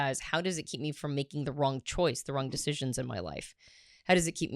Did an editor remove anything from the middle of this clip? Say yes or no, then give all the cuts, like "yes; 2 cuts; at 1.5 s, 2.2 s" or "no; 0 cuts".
no; 0 cuts